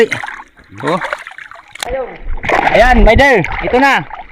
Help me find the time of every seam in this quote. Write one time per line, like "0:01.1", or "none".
0:01.8